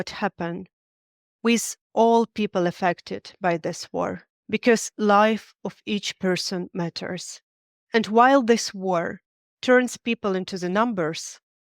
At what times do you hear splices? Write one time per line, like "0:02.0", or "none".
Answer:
0:04.3